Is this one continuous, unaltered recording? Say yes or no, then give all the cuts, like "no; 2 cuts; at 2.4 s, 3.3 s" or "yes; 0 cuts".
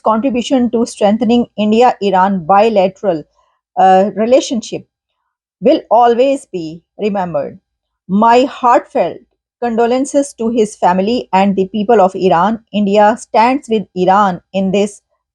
yes; 0 cuts